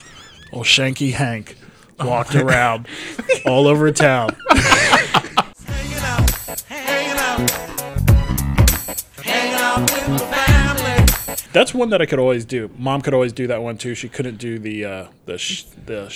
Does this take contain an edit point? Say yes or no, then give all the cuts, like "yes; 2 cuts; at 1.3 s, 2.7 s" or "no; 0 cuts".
yes; 2 cuts; at 5.5 s, 11.4 s